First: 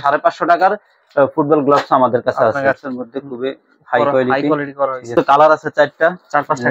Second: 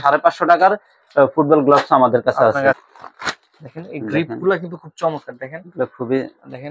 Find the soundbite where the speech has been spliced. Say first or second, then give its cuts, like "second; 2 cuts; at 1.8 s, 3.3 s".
first; 2 cuts; at 2.9 s, 5.1 s